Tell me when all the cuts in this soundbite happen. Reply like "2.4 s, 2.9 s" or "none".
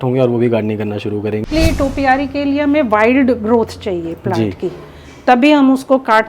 1.5 s